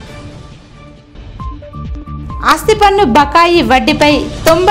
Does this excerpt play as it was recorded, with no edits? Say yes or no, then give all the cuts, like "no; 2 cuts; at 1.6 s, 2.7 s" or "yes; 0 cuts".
no; 1 cut; at 0.9 s